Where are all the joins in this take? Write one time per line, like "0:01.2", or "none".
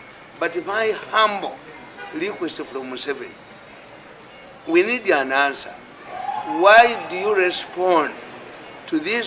none